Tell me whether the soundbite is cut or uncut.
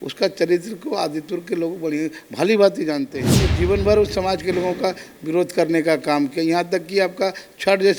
uncut